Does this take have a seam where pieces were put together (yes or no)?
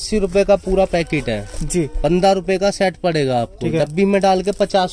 no